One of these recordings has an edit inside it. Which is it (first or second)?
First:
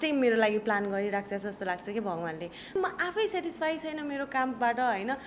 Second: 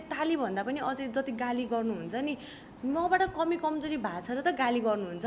first